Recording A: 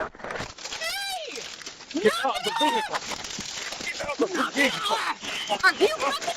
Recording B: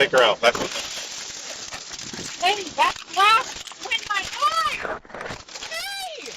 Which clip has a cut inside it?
B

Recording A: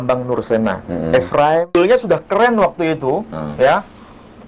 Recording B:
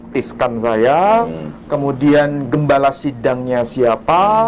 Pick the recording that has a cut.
A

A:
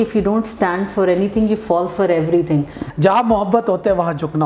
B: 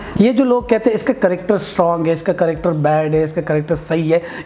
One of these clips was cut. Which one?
A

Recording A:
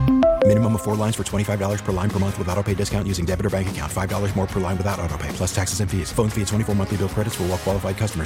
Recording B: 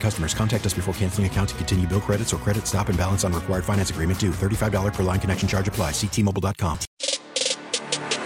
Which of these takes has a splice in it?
B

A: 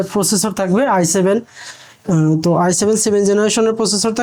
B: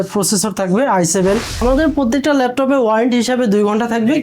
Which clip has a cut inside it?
B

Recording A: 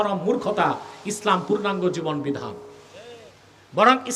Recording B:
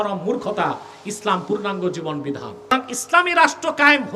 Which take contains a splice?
B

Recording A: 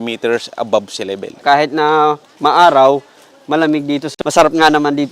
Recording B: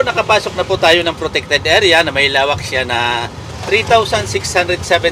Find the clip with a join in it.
A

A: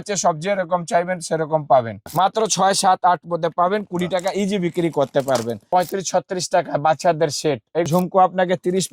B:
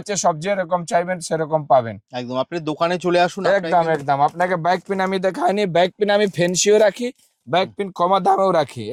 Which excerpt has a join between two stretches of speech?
A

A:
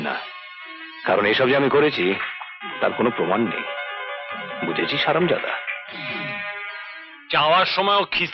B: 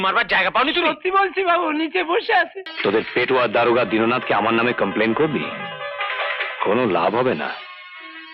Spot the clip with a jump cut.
B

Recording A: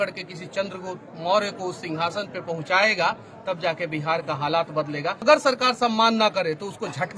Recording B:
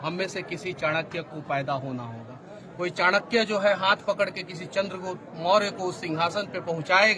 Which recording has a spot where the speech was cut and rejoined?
A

